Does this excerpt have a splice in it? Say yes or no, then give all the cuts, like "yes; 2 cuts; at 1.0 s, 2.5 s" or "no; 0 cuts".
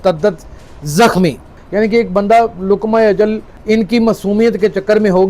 yes; 1 cut; at 1.5 s